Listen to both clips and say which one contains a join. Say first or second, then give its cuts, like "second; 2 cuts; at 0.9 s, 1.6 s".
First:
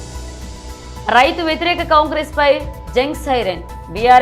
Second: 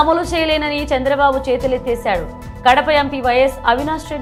first; 1 cut; at 1.0 s